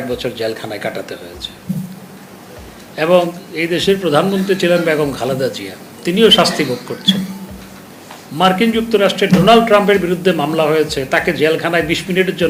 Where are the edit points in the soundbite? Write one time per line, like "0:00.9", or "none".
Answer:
none